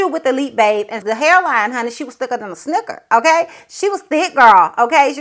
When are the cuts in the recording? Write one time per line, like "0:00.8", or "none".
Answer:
0:01.0